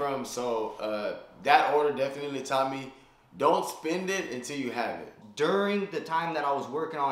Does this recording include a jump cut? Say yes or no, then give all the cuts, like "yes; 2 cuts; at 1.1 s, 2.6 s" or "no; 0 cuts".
yes; 1 cut; at 5.2 s